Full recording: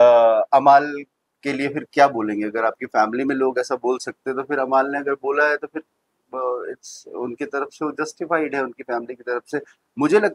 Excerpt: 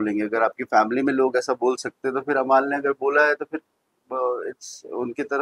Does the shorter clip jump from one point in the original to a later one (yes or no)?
no